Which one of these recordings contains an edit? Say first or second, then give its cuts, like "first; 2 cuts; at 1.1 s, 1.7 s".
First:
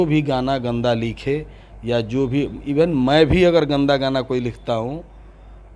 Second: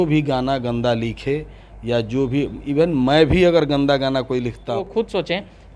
second; 1 cut; at 4.8 s